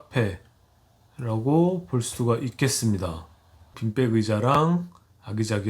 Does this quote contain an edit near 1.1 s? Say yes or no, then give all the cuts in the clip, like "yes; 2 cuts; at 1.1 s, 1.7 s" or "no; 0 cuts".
no; 1 cut; at 3.8 s